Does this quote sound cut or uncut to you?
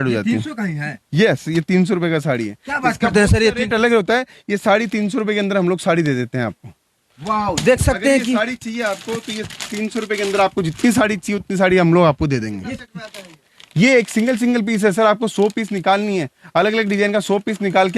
uncut